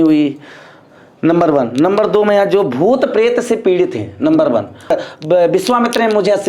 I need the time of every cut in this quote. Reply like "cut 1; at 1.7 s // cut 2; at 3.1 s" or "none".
cut 1; at 4.9 s